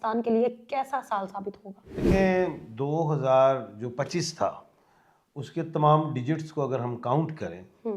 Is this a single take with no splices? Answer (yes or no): no